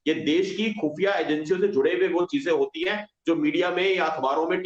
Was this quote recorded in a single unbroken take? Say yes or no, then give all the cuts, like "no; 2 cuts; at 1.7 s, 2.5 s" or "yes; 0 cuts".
yes; 0 cuts